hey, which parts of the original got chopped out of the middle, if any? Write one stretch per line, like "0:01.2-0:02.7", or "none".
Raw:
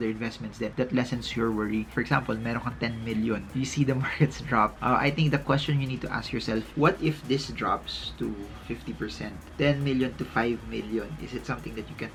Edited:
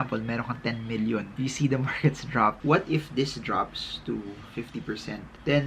0:04.7-0:06.7